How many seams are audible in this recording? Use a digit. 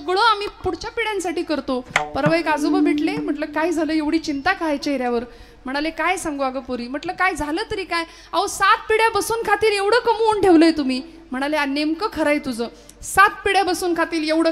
0